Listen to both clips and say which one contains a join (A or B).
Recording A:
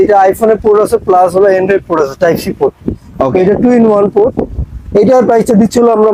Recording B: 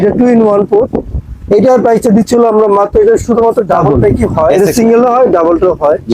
B